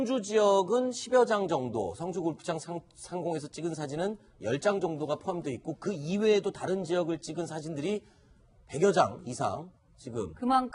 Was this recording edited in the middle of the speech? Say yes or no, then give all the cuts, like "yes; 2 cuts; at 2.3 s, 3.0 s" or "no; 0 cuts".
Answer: no; 0 cuts